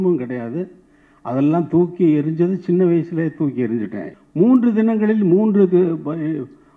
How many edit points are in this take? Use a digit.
1